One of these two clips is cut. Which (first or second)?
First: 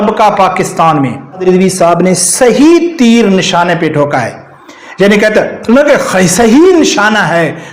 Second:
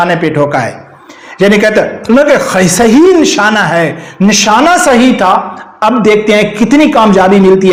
first